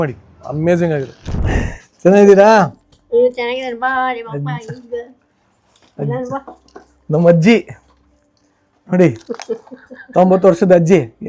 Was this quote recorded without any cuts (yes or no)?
no